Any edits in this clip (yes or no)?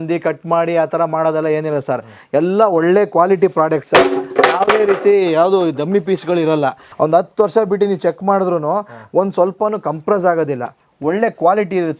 yes